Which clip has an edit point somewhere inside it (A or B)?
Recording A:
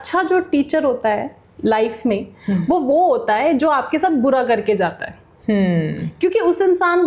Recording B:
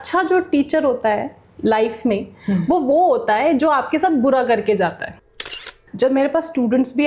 B